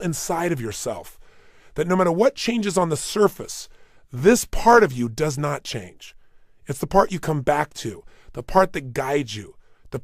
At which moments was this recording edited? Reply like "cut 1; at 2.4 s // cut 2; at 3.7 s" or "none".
none